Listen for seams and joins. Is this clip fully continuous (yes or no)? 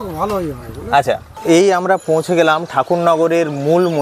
no